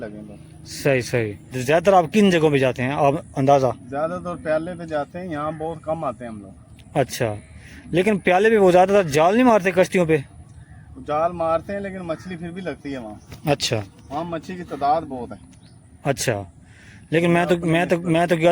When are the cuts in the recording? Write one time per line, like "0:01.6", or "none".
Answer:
0:01.5